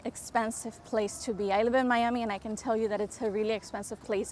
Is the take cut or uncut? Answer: uncut